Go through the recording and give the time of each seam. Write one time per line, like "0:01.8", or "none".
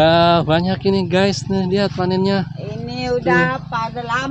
none